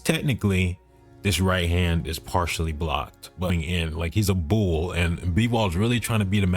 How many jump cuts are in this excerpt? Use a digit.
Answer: 1